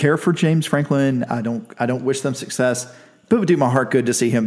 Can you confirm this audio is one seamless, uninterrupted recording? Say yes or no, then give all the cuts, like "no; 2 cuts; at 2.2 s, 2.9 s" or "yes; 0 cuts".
yes; 0 cuts